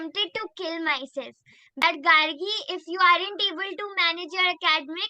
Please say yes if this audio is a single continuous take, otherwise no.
no